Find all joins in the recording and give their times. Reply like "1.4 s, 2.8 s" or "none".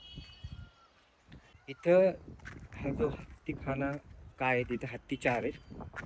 1.6 s